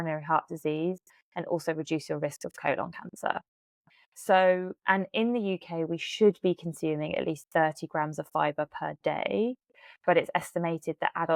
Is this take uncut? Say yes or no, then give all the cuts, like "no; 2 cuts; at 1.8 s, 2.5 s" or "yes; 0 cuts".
yes; 0 cuts